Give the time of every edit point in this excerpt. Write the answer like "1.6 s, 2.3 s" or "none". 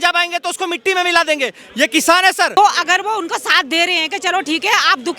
2.5 s